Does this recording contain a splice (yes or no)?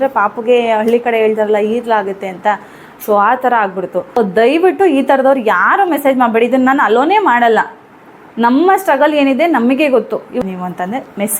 yes